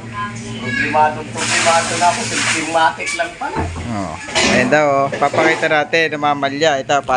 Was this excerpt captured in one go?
yes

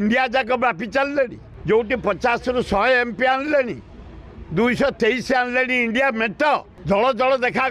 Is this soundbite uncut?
no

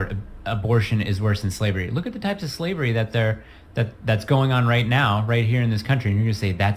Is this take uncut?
no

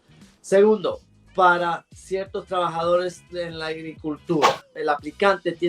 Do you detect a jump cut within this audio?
yes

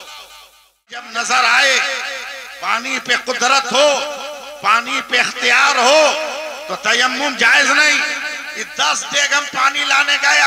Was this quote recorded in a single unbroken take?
no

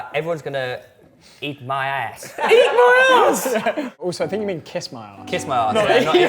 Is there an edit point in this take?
yes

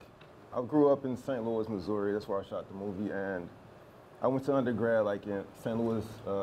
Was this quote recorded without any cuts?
no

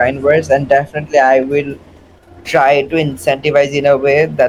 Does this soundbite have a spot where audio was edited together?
no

